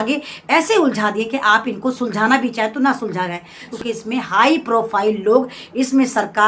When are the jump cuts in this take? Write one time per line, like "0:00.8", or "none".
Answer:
0:03.6